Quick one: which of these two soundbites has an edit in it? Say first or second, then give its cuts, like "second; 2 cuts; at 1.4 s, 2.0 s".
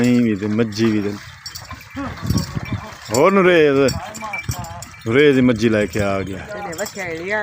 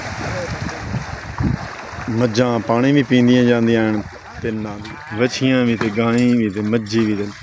second; 1 cut; at 4.7 s